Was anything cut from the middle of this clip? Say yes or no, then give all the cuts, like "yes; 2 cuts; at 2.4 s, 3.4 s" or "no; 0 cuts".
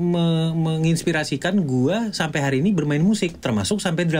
no; 0 cuts